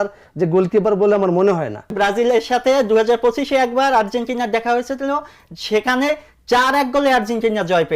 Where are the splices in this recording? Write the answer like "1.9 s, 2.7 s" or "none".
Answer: 1.9 s